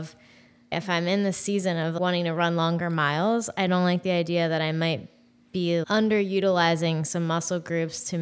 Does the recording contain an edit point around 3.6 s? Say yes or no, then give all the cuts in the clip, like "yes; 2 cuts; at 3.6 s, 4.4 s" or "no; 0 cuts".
no; 3 cuts; at 0.7 s, 1.9 s, 5.9 s